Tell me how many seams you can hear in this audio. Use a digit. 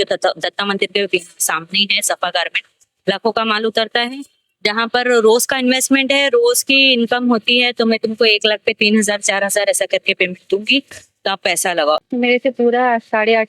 1